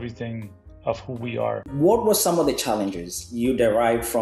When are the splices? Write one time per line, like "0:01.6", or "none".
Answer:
0:01.7